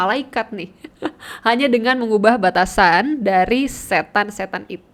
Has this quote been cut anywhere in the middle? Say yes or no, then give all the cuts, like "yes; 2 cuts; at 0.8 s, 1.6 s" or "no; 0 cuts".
no; 0 cuts